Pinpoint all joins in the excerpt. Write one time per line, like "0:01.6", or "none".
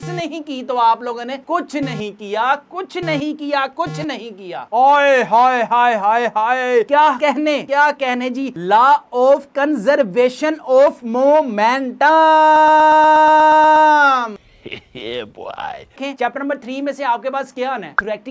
0:16.0